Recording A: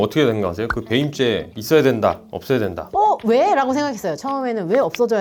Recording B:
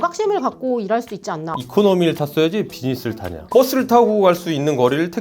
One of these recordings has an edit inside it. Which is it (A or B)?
B